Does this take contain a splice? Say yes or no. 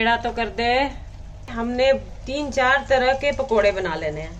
yes